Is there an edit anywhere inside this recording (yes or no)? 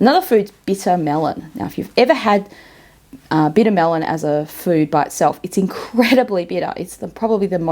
no